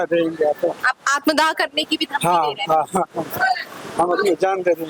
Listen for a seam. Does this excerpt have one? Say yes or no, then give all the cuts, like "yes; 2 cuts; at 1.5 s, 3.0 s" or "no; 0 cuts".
no; 0 cuts